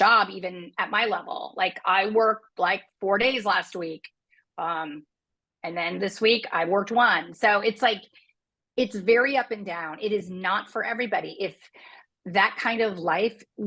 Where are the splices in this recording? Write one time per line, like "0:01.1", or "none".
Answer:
none